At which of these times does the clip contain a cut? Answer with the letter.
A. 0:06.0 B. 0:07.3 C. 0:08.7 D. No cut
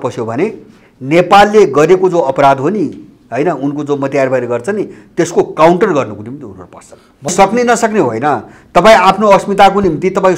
B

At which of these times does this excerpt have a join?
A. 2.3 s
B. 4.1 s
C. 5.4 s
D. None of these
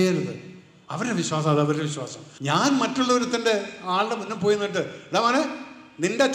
A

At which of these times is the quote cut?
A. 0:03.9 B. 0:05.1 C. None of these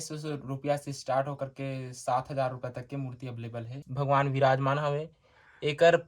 A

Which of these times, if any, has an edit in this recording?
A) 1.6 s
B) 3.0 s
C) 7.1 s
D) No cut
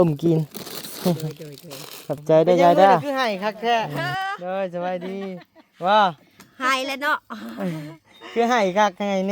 B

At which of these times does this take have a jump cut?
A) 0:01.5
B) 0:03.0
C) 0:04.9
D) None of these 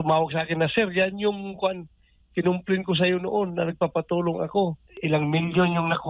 C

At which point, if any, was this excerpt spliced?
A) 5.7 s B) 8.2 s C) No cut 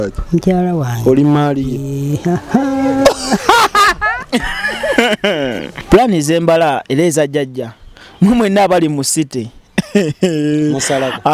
A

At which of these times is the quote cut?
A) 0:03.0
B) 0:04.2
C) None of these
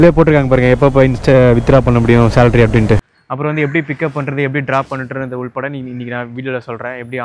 A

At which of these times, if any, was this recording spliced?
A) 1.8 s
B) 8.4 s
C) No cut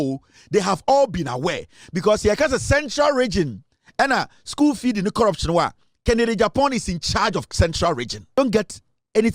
B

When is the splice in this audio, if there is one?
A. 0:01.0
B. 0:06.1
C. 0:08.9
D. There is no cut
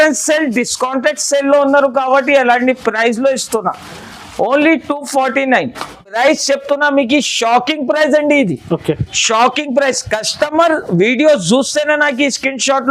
B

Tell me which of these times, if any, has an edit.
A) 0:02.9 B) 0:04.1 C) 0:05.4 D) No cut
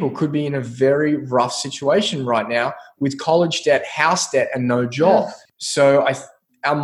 C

